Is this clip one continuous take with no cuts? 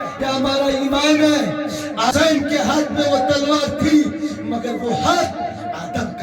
no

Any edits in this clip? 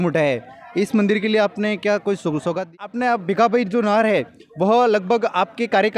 yes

